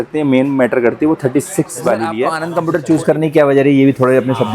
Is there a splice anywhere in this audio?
yes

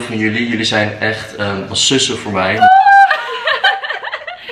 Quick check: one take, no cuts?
no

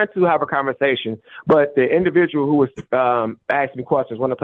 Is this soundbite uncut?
yes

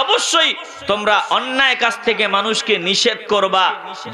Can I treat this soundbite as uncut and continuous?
yes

